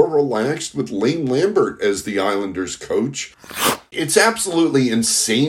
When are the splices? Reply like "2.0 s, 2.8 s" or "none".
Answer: 3.7 s